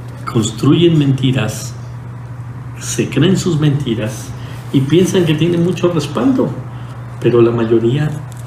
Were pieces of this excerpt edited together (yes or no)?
no